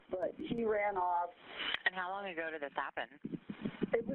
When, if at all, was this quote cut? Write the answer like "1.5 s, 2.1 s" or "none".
none

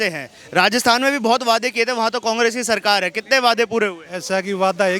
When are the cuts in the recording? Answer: none

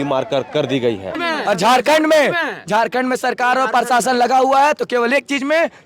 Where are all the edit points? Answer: 1.2 s

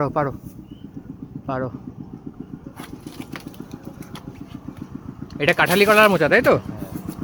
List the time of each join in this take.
none

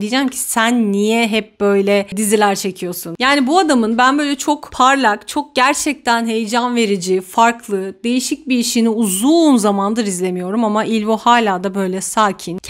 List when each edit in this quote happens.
none

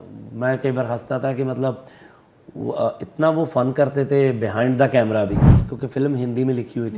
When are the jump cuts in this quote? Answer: 5.5 s

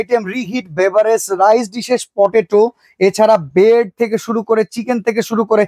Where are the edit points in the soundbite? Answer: none

